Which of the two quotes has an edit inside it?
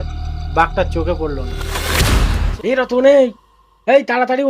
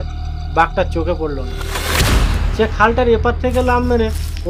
first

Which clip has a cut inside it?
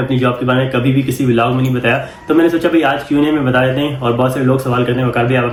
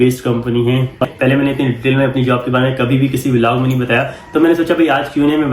second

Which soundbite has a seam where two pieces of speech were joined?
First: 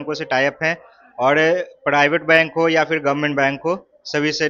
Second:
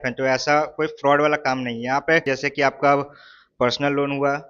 second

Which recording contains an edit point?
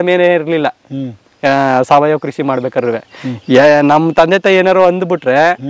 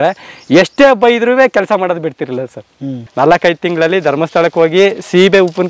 second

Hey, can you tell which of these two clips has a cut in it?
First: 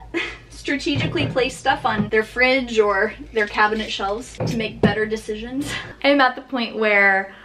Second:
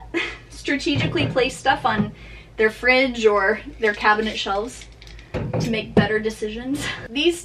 first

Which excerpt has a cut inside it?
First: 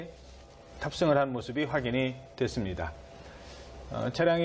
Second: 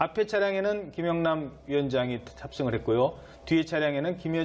second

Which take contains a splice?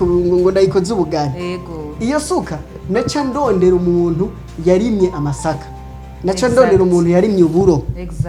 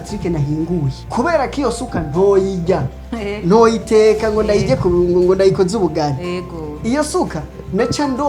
second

